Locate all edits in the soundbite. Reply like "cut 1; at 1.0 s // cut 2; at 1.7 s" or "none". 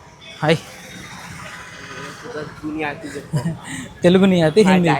none